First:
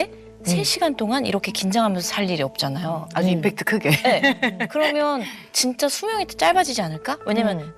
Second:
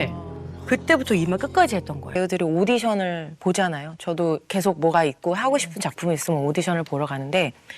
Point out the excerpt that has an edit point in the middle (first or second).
second